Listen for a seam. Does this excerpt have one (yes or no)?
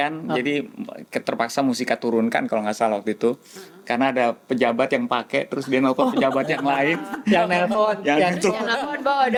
no